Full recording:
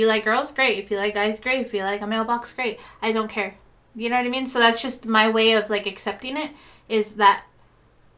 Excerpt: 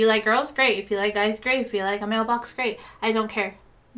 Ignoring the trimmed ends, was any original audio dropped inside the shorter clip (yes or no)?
no